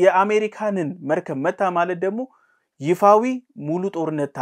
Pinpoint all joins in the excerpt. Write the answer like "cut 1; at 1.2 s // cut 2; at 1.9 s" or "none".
none